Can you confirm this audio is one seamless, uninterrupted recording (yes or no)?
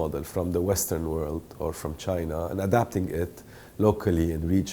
yes